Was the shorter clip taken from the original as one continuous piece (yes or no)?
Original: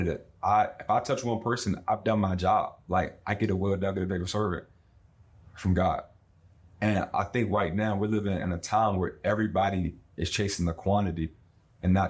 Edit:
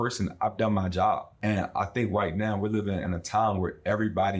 no